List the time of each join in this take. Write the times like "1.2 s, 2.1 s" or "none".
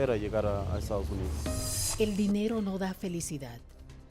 1.6 s